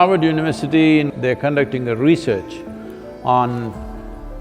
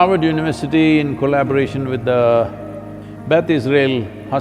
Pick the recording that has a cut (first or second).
first